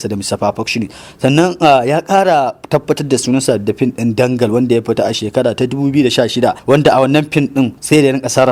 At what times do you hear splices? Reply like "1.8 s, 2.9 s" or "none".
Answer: none